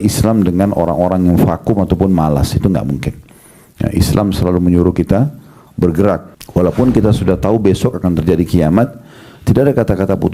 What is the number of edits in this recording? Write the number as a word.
one